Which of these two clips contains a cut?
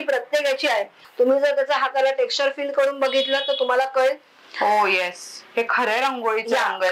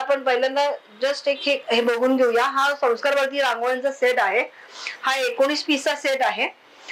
first; 1 cut; at 1.0 s

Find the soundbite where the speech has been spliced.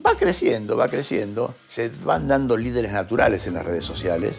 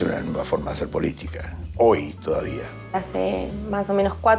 second; 1 cut; at 2.9 s

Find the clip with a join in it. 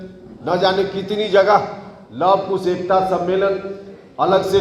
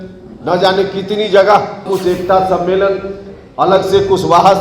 second; 1 cut; at 1.8 s

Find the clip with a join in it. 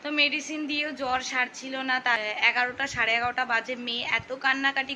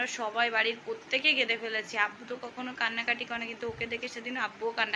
first; 1 cut; at 2.2 s

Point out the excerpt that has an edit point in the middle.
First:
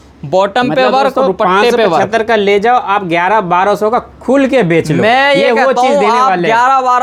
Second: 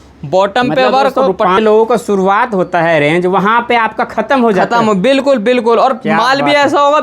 second; 1 cut; at 1.6 s

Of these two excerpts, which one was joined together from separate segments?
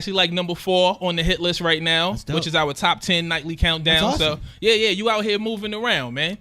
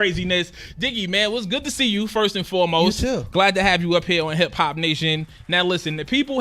second; 1 cut; at 2.3 s

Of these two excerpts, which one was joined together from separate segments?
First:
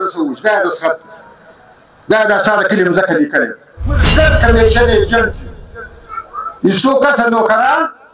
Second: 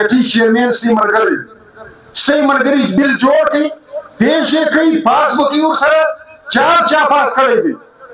first; 1 cut; at 4.1 s

